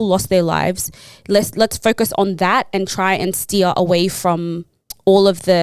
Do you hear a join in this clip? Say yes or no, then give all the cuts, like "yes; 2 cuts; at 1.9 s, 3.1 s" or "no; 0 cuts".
no; 0 cuts